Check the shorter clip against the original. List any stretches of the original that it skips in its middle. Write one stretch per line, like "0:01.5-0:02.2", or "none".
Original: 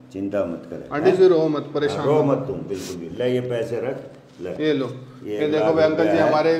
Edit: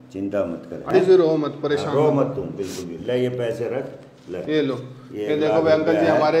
0:00.9-0:01.0